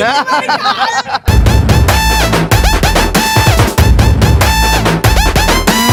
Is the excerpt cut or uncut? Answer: uncut